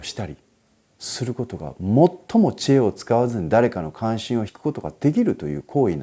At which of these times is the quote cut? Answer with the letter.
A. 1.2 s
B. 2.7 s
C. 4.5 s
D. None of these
C